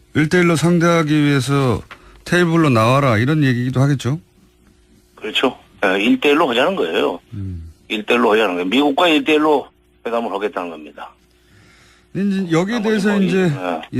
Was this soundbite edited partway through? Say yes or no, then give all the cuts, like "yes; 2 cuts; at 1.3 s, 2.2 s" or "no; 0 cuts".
yes; 1 cut; at 8.5 s